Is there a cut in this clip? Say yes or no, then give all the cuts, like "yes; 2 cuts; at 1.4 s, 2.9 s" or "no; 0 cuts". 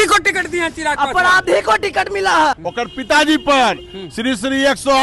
yes; 1 cut; at 2.6 s